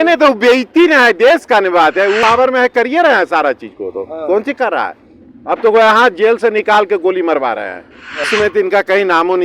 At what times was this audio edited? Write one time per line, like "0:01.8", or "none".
0:02.2
0:08.3